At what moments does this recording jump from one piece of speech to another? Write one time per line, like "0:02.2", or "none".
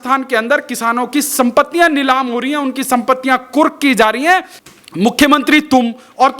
0:04.6